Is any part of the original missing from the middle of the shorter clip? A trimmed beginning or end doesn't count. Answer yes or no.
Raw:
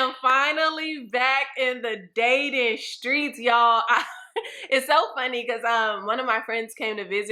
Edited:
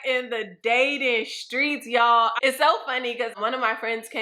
yes